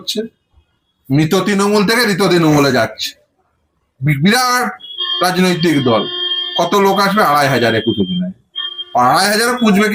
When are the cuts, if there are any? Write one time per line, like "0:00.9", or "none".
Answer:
none